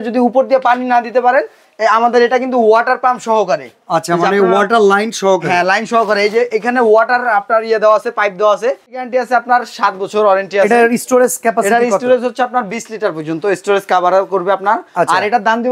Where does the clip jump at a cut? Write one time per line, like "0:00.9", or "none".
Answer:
0:09.0

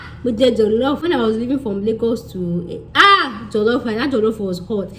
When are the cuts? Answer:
0:01.0

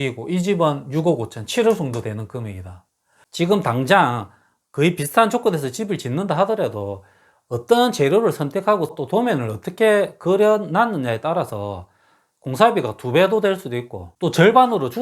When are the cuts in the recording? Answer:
0:03.2

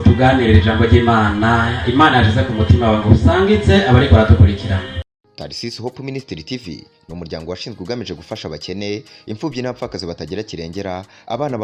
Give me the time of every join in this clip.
0:05.1

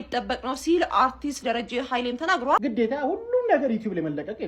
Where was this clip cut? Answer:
0:02.6

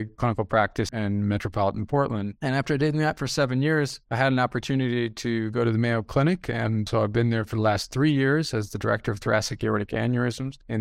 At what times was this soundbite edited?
0:00.9
0:02.3

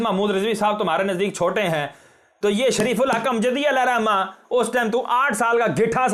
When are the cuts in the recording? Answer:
none

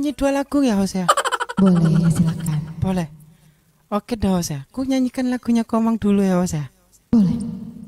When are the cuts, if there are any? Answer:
none

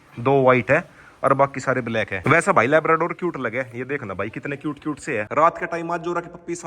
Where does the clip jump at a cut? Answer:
0:02.2
0:05.3

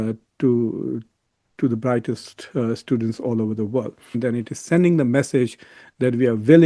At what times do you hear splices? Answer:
0:04.2

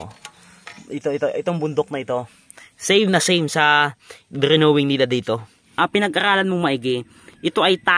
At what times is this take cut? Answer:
0:05.6

